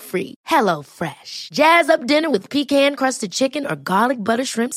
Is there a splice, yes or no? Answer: no